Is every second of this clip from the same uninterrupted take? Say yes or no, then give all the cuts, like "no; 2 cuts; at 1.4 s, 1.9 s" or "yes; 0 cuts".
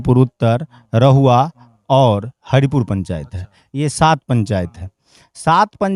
yes; 0 cuts